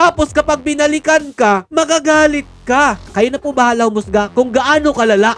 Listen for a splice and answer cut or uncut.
cut